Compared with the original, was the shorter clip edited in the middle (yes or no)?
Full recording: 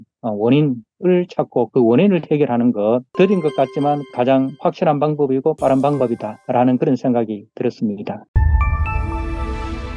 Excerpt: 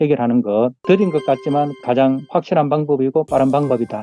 no